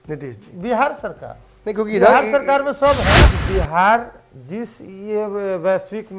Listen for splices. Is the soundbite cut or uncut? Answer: cut